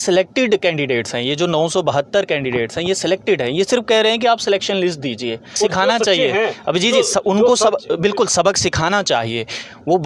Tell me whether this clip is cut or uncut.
cut